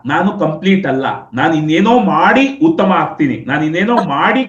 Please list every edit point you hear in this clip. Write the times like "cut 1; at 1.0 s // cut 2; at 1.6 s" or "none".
none